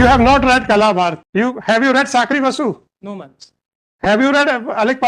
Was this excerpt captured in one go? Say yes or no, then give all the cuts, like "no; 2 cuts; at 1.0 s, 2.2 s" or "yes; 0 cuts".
no; 1 cut; at 1.2 s